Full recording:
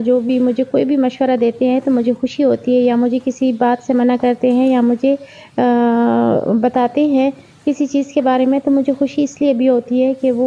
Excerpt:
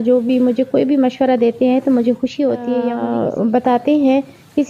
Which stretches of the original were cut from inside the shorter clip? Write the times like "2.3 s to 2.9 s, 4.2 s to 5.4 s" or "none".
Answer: 2.8 s to 5.9 s